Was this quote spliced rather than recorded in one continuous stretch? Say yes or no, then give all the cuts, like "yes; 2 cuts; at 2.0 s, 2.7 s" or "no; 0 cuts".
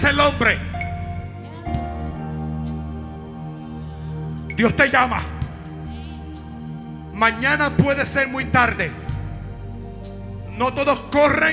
no; 0 cuts